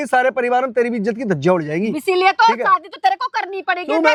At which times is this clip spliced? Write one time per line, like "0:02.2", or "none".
none

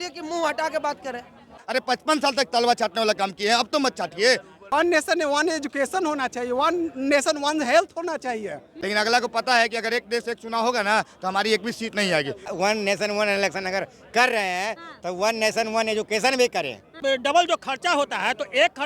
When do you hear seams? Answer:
0:01.5
0:04.7
0:08.7
0:12.5
0:16.9

